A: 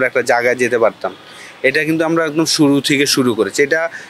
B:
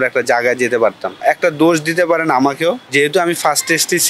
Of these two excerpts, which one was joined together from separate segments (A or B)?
B